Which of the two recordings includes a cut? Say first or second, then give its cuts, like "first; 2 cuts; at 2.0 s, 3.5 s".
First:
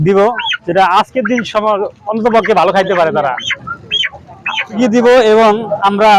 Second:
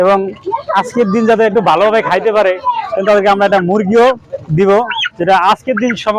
first; 1 cut; at 4.8 s